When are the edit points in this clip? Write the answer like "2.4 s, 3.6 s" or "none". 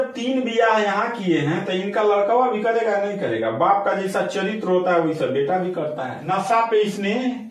6.2 s